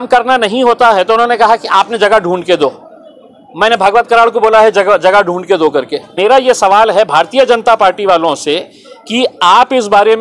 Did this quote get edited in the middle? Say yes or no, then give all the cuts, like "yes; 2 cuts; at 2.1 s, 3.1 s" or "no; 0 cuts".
yes; 1 cut; at 6.1 s